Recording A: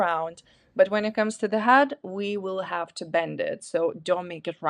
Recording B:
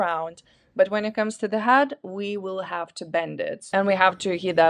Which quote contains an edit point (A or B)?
B